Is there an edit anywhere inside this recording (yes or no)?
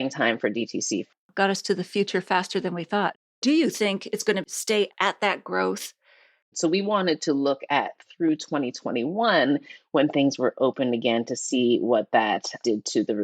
yes